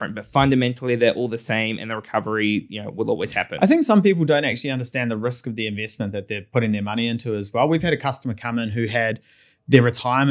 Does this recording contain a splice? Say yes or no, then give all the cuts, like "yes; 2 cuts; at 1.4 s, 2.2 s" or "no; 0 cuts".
no; 0 cuts